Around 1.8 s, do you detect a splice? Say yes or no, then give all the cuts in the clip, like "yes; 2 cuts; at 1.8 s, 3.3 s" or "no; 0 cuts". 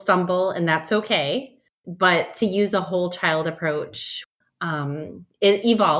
yes; 2 cuts; at 1.8 s, 4.2 s